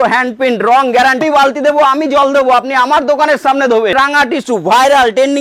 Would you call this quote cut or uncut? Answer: cut